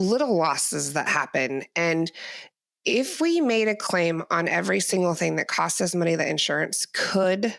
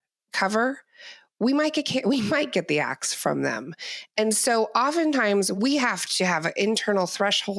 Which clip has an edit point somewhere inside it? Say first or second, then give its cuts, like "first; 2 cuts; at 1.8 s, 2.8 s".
second; 1 cut; at 5.5 s